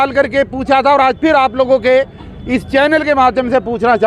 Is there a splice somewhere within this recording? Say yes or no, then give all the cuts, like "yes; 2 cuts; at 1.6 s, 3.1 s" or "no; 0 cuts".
no; 0 cuts